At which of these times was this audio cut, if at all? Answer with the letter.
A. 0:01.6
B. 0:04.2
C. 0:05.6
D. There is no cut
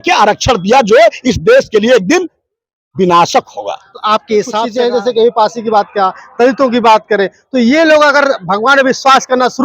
B